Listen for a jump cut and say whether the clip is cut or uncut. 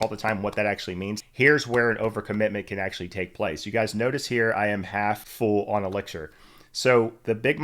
cut